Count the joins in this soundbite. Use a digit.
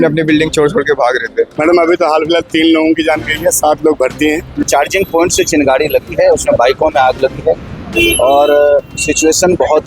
2